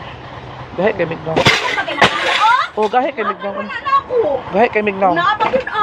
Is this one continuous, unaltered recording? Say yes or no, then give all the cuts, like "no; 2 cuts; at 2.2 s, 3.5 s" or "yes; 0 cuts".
yes; 0 cuts